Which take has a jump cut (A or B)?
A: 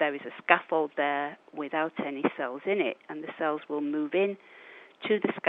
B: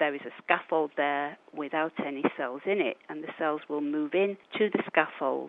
B